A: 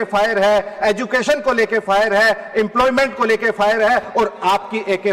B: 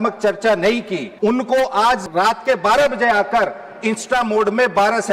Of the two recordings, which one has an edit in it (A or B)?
B